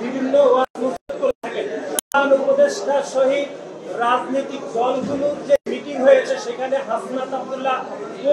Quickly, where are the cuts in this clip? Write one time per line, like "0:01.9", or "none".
0:02.0